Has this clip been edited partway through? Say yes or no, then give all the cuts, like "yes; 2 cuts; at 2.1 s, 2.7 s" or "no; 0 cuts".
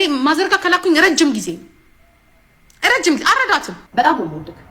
yes; 1 cut; at 3.8 s